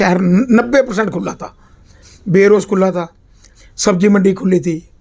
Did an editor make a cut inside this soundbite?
no; 0 cuts

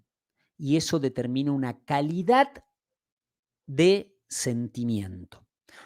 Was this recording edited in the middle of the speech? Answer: no; 0 cuts

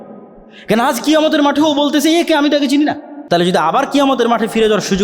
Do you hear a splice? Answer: yes; 1 cut; at 3.1 s

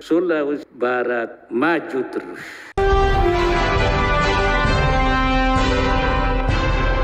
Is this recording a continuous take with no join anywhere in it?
yes; 0 cuts

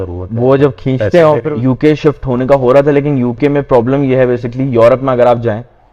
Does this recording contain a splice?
yes; 1 cut; at 1.4 s

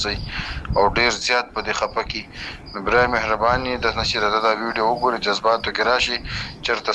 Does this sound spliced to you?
no; 0 cuts

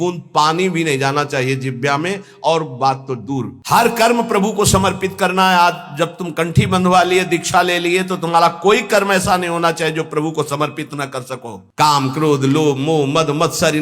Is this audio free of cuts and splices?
no; 2 cuts; at 3.5 s, 11.6 s

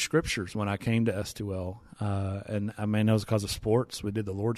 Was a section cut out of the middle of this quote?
no; 0 cuts

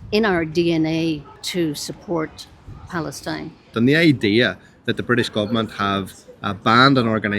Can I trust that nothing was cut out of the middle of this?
no; 2 cuts; at 1.4 s, 3.7 s

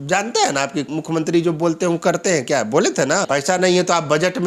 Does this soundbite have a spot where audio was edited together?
yes; 2 cuts; at 0.9 s, 3.2 s

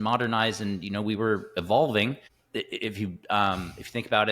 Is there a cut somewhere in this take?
yes; 1 cut; at 2.3 s

